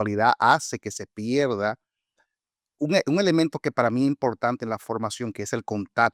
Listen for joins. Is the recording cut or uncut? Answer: uncut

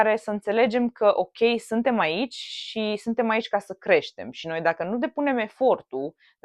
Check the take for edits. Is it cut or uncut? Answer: uncut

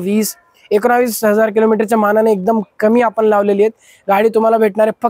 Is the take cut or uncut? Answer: uncut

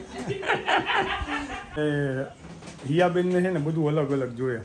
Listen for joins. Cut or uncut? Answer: cut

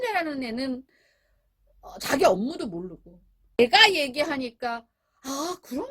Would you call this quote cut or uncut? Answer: cut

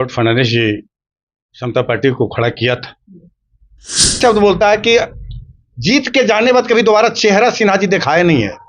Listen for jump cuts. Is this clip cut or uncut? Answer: cut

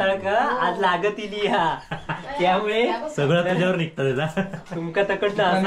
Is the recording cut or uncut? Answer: uncut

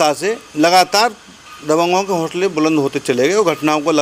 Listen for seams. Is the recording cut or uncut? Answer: uncut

